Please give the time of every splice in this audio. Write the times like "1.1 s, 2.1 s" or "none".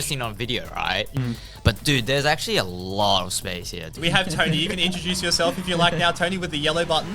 1.2 s, 3.9 s